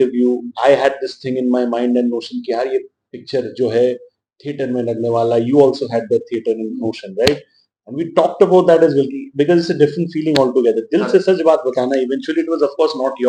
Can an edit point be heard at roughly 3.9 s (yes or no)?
no